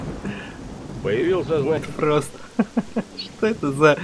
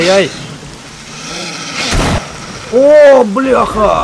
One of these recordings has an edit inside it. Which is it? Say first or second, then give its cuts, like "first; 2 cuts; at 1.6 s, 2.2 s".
first; 1 cut; at 1.8 s